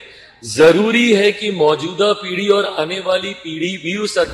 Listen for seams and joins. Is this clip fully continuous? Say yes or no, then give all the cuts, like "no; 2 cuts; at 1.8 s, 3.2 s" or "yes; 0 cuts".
yes; 0 cuts